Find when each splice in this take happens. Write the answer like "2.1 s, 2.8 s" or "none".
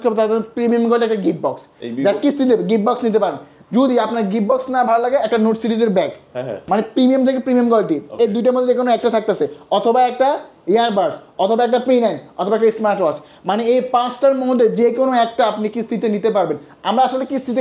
none